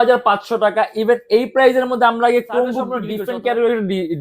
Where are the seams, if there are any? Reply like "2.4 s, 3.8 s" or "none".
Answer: 3.1 s